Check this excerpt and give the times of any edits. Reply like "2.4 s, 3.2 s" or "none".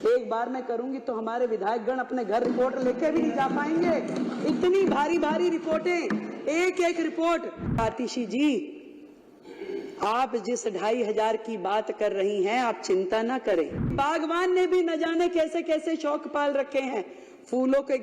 7.8 s, 13.9 s